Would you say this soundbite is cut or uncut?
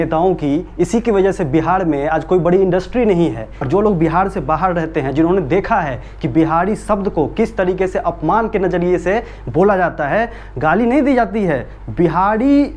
cut